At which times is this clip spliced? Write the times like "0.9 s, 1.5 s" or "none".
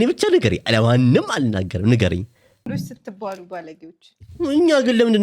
2.7 s